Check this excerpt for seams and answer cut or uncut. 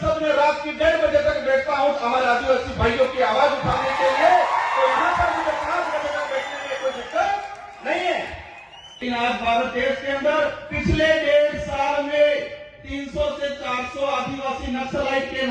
cut